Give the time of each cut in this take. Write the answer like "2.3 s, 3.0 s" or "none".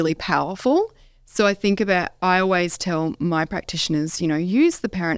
none